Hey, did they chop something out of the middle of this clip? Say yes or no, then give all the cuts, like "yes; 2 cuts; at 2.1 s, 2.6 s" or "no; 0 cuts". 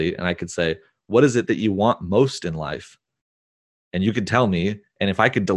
no; 0 cuts